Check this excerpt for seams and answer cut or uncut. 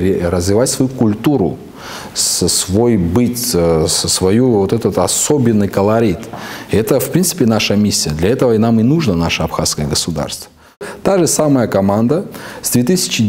cut